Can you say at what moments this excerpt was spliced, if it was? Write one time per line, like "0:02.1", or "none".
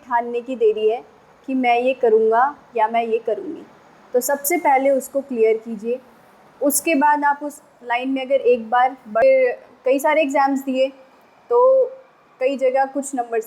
0:09.2